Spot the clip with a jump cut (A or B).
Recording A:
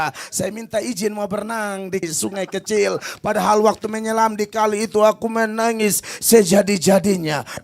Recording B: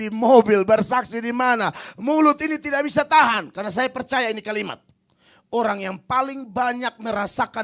A